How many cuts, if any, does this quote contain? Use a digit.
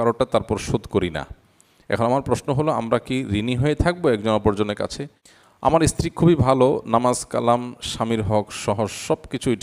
1